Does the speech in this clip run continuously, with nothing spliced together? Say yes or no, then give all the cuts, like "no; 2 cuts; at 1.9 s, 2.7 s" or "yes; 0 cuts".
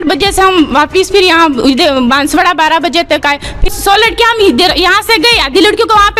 yes; 0 cuts